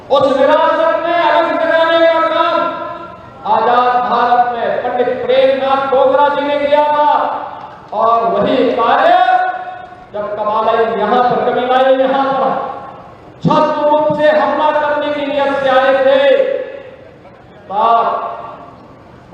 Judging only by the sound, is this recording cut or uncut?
uncut